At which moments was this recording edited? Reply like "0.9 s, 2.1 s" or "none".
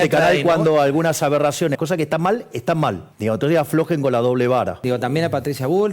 1.8 s, 3.1 s, 4.8 s